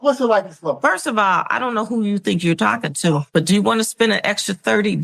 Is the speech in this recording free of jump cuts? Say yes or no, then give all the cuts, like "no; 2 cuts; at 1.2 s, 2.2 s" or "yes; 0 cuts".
yes; 0 cuts